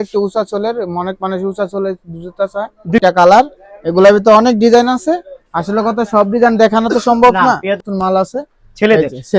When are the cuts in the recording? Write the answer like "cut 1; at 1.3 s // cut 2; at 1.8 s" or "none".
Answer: cut 1; at 3.0 s // cut 2; at 7.8 s